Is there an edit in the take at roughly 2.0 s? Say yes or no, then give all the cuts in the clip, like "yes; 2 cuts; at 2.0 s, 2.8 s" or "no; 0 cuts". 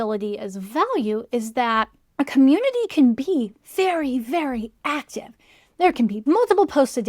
yes; 2 cuts; at 2.0 s, 6.2 s